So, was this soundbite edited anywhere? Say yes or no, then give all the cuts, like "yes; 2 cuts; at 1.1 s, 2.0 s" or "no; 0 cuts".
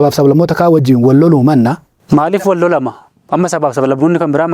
yes; 1 cut; at 2.0 s